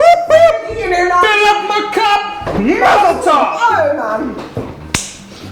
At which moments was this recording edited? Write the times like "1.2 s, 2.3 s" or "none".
4.1 s